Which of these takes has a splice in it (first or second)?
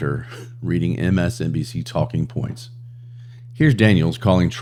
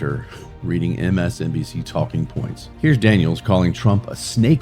second